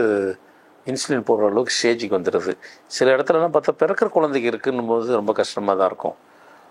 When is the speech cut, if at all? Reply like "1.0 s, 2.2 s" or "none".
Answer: none